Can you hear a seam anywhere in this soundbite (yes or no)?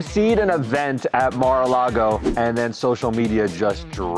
no